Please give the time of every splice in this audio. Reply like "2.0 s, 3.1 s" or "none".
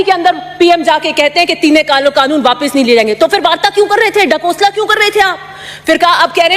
none